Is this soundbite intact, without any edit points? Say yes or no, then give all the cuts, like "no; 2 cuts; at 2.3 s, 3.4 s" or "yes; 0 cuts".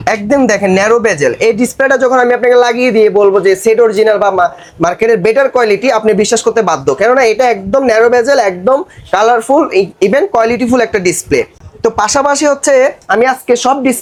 yes; 0 cuts